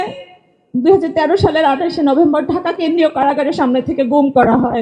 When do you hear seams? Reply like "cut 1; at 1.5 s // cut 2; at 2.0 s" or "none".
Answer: none